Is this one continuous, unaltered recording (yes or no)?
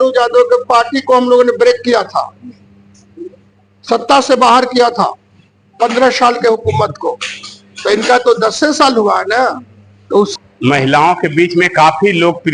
no